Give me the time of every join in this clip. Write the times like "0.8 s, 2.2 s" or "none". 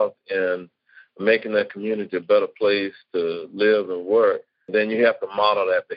4.7 s